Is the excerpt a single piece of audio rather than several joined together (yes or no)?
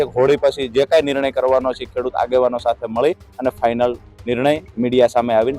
yes